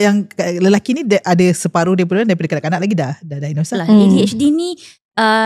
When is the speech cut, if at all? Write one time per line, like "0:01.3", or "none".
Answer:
0:03.8